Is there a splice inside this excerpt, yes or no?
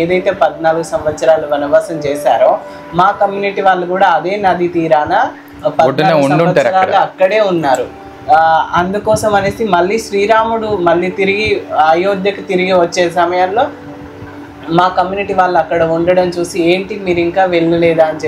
no